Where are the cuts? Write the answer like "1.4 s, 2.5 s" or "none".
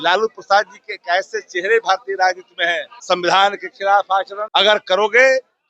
2.9 s, 4.4 s

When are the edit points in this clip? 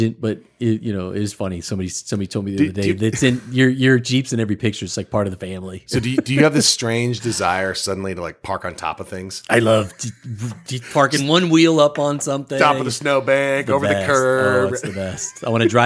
none

